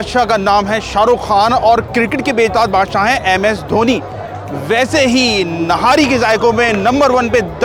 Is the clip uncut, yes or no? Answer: yes